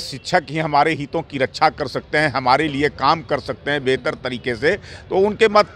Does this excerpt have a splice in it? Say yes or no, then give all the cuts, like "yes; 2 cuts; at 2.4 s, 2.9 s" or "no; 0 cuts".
no; 0 cuts